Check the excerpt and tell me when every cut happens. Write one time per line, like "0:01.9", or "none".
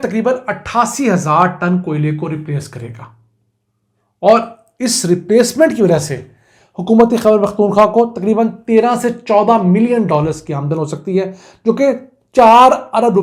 none